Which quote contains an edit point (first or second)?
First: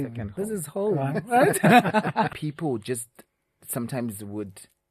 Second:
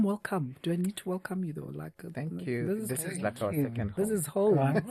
first